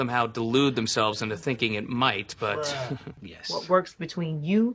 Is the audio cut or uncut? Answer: cut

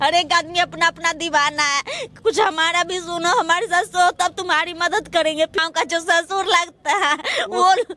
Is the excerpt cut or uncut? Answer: cut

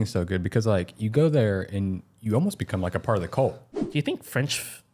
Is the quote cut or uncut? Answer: cut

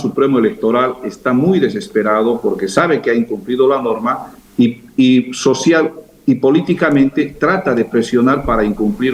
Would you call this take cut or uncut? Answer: uncut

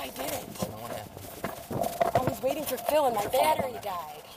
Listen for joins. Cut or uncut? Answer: uncut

